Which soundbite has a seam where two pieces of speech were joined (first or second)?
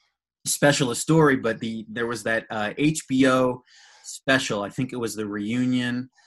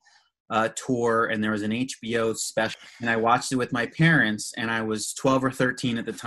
second